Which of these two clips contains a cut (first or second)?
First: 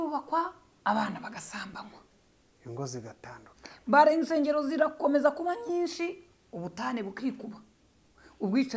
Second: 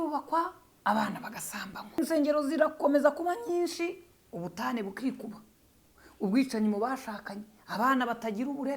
second